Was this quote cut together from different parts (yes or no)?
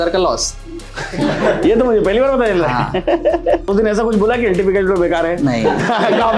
yes